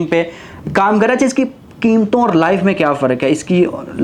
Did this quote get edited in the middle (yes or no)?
no